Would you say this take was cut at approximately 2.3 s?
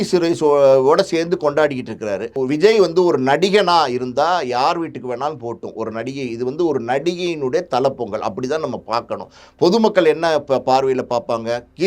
yes; 1 cut; at 2.3 s

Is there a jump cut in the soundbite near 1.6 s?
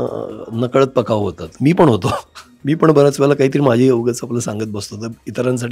no; 0 cuts

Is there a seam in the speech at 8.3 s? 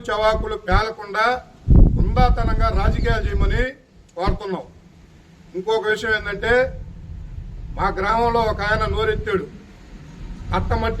yes; 1 cut; at 8.3 s

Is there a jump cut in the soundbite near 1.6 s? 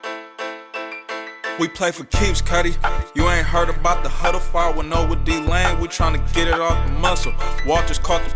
yes; 1 cut; at 1.6 s

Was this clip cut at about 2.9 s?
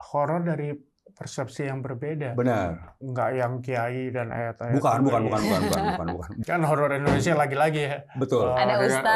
yes; 2 cuts; at 2.9 s, 6.3 s

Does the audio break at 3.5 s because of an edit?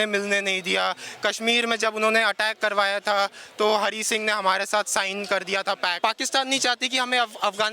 no; 1 cut; at 6.0 s

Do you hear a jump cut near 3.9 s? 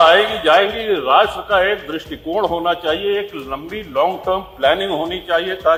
no; 0 cuts

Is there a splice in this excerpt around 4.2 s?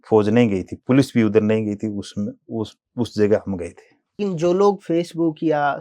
yes; 1 cut; at 4.2 s

